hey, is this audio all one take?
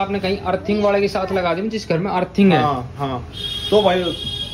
yes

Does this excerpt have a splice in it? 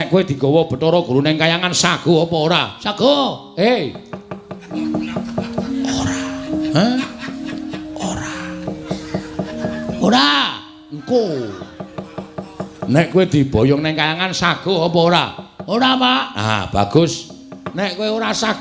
yes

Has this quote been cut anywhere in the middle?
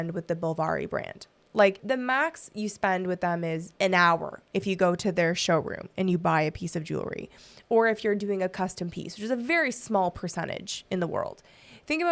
no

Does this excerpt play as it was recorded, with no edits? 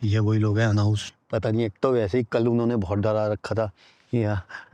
no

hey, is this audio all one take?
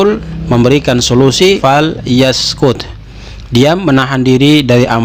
no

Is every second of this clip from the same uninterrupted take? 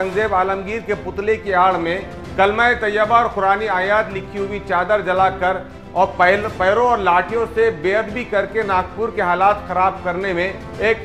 yes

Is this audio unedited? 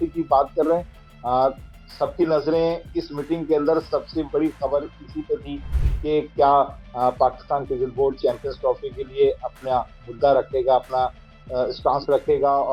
yes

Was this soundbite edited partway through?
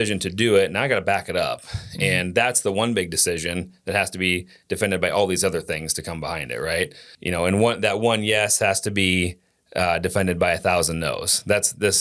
yes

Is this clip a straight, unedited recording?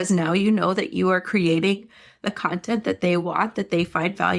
yes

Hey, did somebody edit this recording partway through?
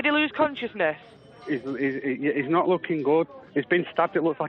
yes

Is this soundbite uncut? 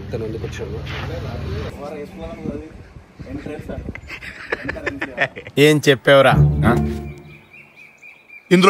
no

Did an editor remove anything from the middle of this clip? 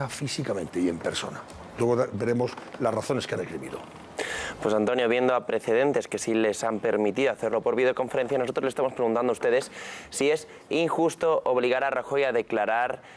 no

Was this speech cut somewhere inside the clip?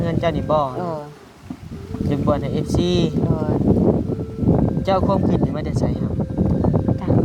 no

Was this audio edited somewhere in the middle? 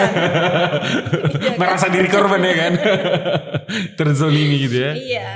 no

